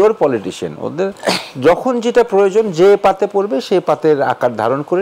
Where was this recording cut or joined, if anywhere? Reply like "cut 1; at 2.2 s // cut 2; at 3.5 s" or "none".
none